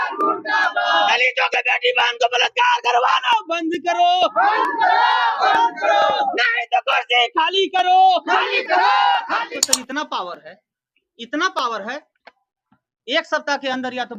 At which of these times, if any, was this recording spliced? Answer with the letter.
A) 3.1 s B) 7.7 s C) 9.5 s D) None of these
C